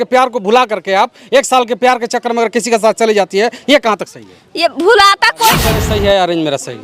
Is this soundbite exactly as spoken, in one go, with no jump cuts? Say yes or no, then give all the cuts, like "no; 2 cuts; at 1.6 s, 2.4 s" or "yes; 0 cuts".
no; 1 cut; at 5.8 s